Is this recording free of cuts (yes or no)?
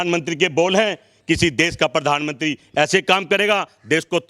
yes